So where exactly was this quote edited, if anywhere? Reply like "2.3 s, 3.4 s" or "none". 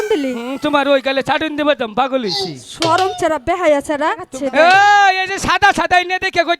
4.3 s